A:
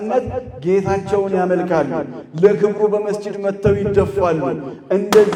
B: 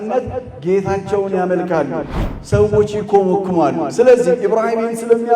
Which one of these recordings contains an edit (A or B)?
B